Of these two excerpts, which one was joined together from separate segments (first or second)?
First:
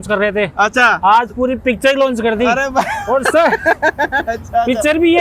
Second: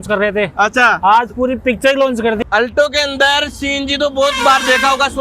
second